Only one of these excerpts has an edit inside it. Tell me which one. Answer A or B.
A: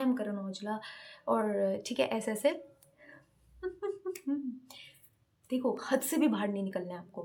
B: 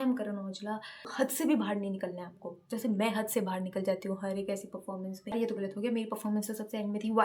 B